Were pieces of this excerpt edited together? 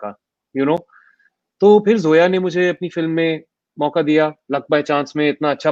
no; 0 cuts

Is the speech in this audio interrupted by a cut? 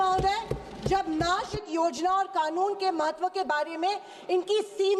yes; 1 cut; at 1.6 s

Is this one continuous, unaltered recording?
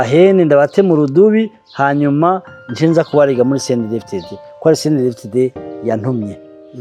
yes; 0 cuts

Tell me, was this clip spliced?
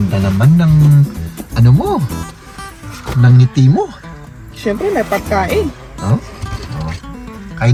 no; 0 cuts

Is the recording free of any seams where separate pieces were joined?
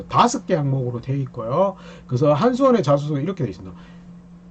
yes; 0 cuts

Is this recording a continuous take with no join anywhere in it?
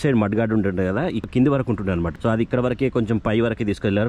no; 2 cuts; at 1.3 s, 2.1 s

